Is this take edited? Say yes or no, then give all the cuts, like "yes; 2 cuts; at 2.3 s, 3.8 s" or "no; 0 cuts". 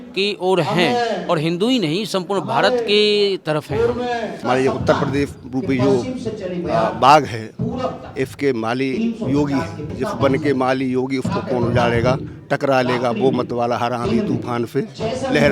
yes; 2 cuts; at 4.4 s, 9.9 s